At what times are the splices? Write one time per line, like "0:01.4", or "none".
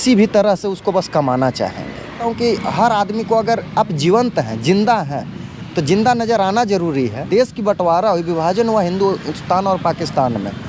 0:02.2
0:07.2